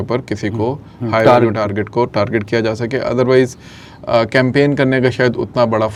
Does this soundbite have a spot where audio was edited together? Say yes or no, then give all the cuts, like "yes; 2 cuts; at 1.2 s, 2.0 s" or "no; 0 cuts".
no; 0 cuts